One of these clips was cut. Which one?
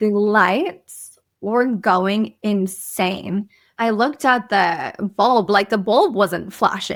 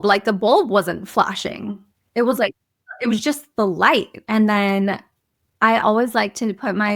second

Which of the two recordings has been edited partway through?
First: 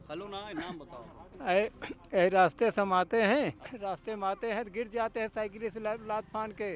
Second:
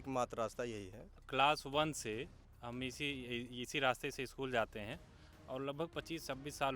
second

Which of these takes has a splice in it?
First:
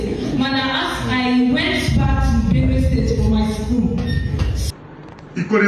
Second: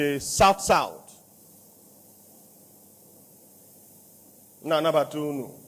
first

